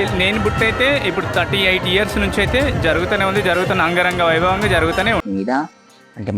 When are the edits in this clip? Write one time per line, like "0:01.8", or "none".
0:05.2